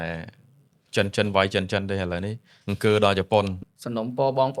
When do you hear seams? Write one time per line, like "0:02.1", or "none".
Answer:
0:03.6